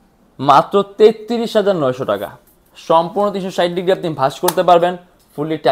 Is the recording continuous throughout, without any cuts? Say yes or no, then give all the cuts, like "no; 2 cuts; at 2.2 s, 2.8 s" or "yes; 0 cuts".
yes; 0 cuts